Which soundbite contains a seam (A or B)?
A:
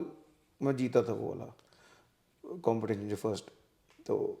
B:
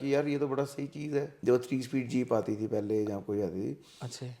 B